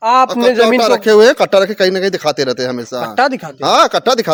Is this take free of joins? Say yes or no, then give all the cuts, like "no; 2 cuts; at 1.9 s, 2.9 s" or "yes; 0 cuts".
yes; 0 cuts